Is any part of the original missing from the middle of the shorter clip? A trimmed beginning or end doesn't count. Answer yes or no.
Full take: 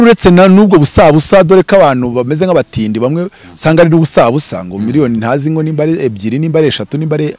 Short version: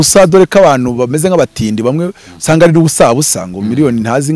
no